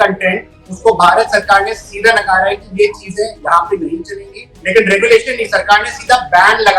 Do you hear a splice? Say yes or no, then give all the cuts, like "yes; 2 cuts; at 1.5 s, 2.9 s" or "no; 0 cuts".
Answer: yes; 1 cut; at 4.6 s